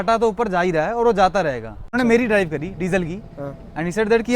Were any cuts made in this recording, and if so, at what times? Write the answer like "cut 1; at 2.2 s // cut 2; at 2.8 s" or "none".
cut 1; at 1.9 s